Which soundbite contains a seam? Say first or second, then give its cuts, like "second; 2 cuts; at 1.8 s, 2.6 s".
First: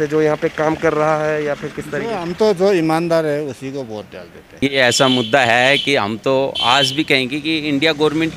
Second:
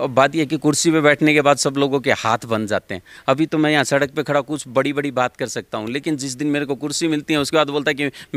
first; 1 cut; at 4.6 s